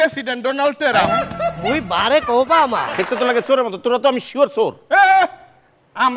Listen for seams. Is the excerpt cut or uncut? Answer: cut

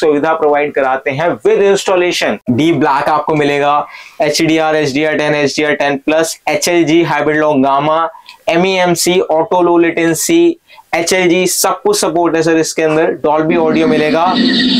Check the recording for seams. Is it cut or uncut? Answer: cut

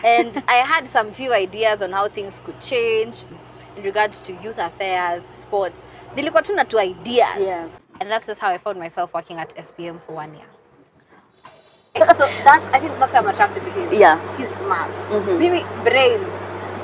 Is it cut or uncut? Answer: cut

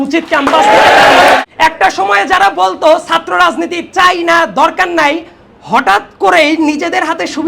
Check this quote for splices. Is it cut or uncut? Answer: cut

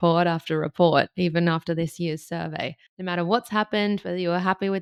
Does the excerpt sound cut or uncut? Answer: uncut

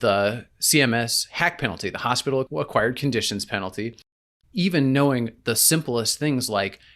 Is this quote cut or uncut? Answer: cut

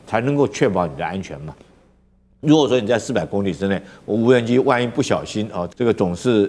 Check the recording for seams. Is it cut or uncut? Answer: cut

